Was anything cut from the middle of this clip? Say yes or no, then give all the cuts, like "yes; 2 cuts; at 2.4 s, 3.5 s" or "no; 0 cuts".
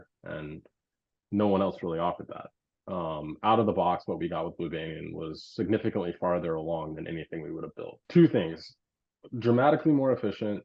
yes; 1 cut; at 8.0 s